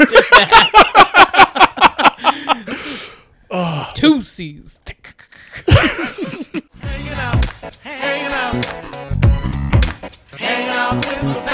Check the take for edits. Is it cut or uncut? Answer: cut